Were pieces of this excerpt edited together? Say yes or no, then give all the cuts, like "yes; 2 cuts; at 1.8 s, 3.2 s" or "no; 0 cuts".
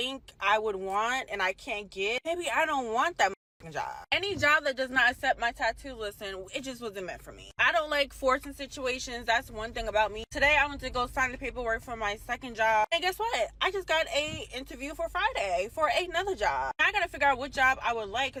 no; 0 cuts